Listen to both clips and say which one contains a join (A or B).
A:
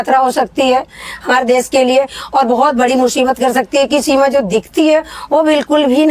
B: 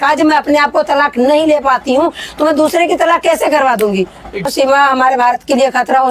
B